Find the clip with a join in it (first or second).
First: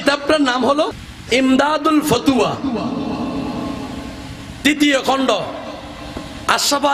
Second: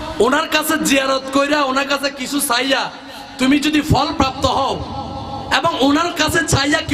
first